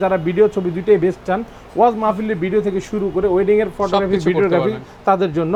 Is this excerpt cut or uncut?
uncut